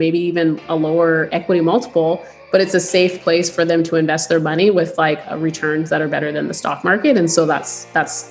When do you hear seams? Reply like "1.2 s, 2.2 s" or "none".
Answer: none